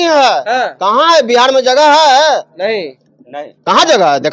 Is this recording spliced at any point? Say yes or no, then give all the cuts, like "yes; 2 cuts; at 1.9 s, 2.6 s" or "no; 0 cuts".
no; 0 cuts